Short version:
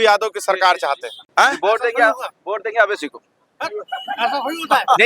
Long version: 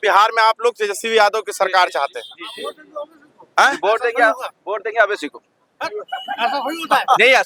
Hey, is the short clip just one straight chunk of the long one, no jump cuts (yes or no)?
no